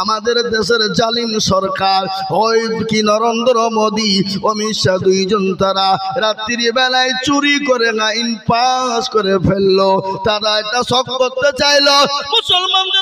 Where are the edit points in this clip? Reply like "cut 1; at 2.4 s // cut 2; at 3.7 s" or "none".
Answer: none